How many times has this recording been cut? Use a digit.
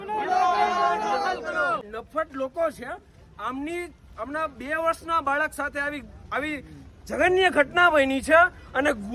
1